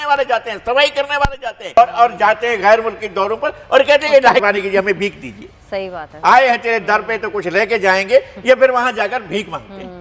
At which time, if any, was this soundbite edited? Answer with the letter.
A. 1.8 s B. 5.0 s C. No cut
A